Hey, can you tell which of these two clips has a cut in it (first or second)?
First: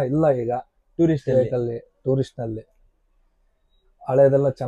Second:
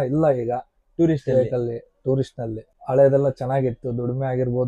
second